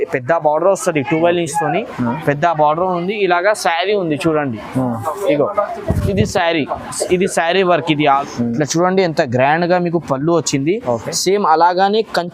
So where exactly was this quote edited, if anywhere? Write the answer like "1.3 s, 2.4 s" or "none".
8.2 s